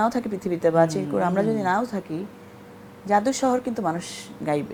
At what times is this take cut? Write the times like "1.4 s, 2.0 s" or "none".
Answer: none

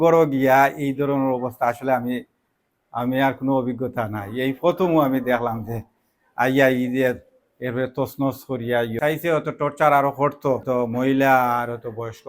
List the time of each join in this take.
9.0 s, 10.6 s

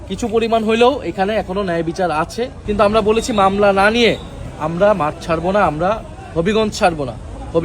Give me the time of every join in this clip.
2.6 s

